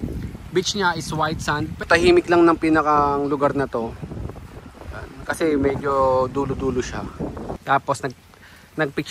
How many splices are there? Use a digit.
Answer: 2